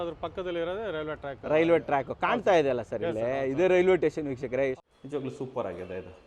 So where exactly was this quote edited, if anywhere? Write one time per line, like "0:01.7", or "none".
0:04.9

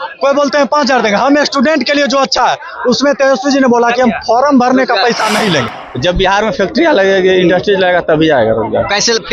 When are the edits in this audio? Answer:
0:05.8

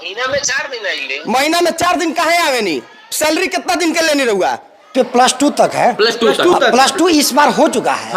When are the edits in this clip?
0:04.9

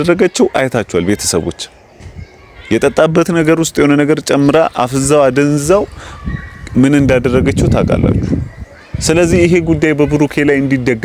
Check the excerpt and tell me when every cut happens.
none

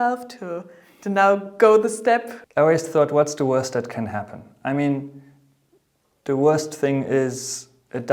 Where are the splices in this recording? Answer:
0:02.4

